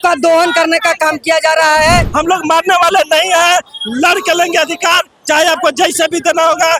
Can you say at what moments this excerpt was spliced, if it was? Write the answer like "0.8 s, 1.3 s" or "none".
2.1 s